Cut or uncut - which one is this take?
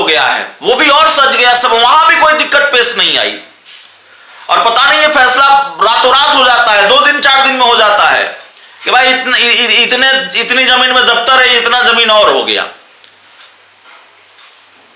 uncut